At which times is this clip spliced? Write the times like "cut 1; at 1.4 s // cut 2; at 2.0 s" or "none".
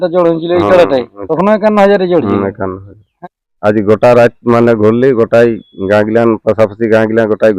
cut 1; at 1.2 s // cut 2; at 3.1 s